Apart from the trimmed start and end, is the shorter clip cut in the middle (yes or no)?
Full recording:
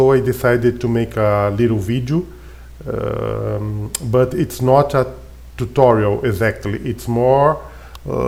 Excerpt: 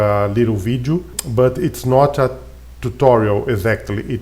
yes